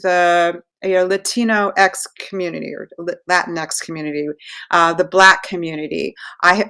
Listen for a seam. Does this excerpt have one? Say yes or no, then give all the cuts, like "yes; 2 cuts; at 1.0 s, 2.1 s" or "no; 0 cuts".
no; 0 cuts